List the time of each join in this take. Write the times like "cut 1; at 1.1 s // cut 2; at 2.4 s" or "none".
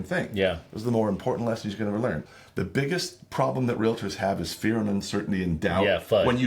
cut 1; at 2.2 s